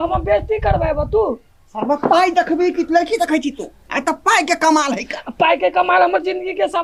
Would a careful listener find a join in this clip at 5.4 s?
no; 0 cuts

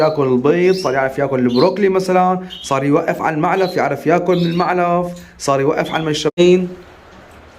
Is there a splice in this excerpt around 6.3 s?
yes; 1 cut; at 6.3 s

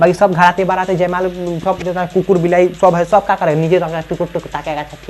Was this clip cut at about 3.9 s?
no; 0 cuts

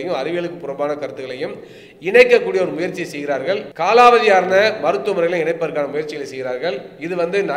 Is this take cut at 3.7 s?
yes; 1 cut; at 3.7 s

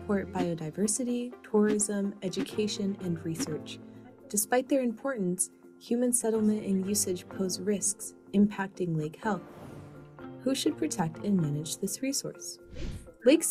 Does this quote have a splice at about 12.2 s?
yes; 1 cut; at 12.2 s

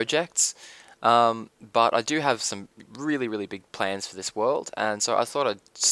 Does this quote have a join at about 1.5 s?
yes; 1 cut; at 1.5 s

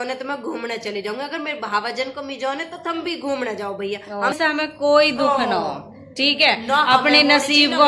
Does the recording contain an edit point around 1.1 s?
no; 1 cut; at 4.4 s

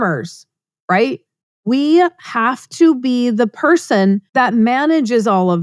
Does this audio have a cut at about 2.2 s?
no; 1 cut; at 4.2 s

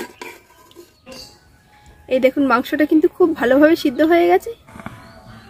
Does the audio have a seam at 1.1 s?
yes; 2 cuts; at 1.1 s, 4.7 s

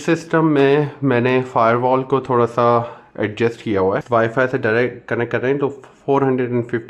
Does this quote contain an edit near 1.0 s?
no; 1 cut; at 4.0 s

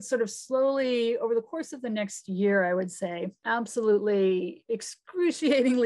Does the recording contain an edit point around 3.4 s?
yes; 1 cut; at 3.4 s

